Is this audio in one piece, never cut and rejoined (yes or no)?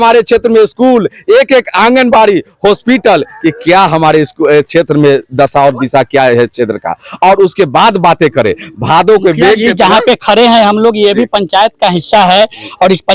yes